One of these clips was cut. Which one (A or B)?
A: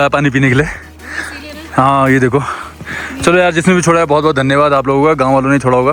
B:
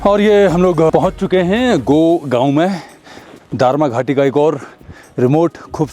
B